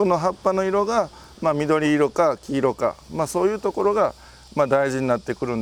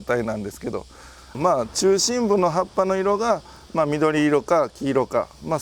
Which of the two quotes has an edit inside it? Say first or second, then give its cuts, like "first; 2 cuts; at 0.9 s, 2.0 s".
second; 1 cut; at 1.4 s